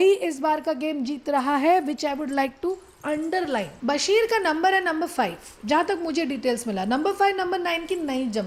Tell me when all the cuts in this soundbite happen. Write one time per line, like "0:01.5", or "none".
0:03.7